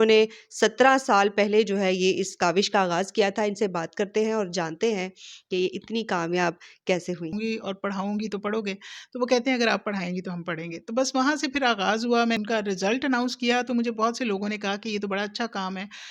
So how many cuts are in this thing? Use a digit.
2